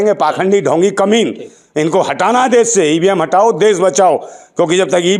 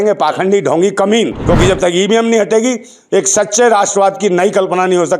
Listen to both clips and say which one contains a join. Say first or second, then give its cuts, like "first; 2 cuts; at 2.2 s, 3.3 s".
second; 1 cut; at 1.4 s